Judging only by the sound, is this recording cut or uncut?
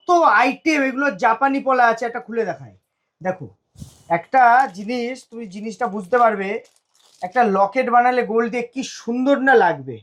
uncut